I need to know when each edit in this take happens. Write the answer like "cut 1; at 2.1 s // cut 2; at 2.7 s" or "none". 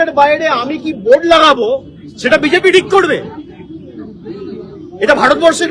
none